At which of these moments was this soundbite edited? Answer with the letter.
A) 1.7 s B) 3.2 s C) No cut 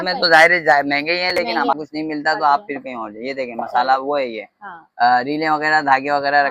A